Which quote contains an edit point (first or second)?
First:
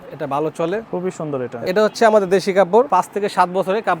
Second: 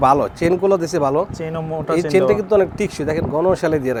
first